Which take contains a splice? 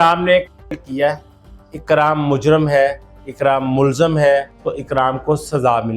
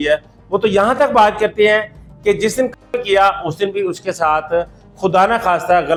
first; 1 cut; at 4.6 s

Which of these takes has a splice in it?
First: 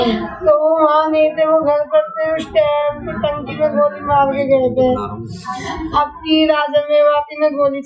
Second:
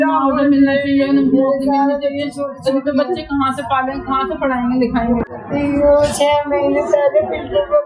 second; 1 cut; at 5.3 s

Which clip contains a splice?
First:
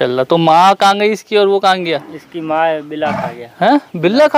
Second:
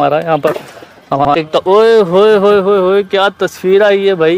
second; 1 cut; at 1.3 s

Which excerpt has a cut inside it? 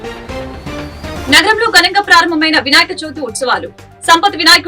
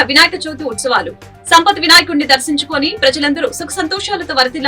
first; 1 cut; at 1.2 s

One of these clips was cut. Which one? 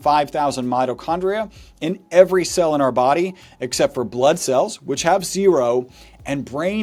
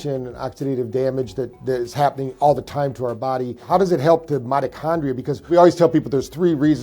second; 2 cuts; at 3.6 s, 5.5 s

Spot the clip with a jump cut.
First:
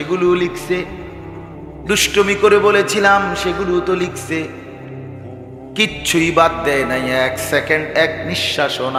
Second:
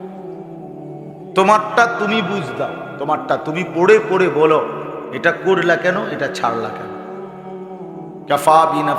second; 2 cuts; at 6.8 s, 8.3 s

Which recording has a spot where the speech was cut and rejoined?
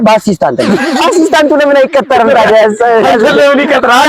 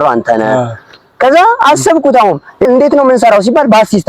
second; 1 cut; at 2.7 s

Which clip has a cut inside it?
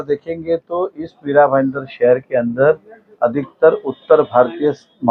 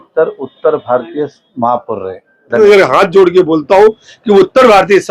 second; 1 cut; at 2.6 s

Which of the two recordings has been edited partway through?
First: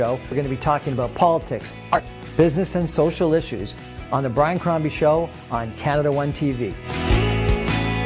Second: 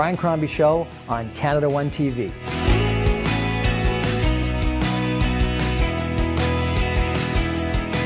first; 1 cut; at 1.9 s

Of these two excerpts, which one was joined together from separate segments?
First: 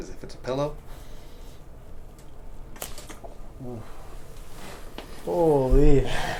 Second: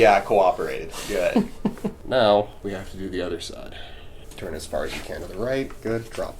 second; 2 cuts; at 2.0 s, 4.3 s

